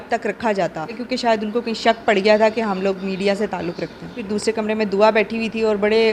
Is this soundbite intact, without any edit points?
no; 2 cuts; at 1.0 s, 4.2 s

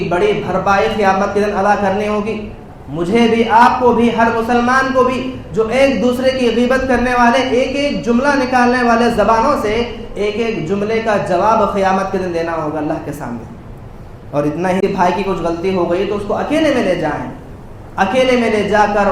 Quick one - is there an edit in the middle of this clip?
yes; 1 cut; at 14.8 s

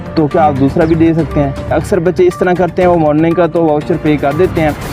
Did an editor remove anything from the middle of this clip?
yes; 1 cut; at 1.7 s

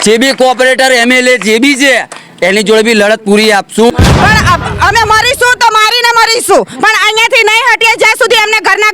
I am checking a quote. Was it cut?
yes; 1 cut; at 3.9 s

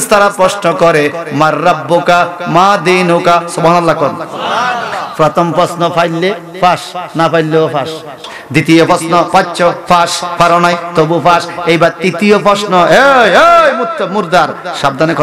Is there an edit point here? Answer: yes; 1 cut; at 8.1 s

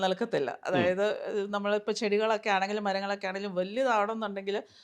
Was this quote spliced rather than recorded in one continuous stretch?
no; 0 cuts

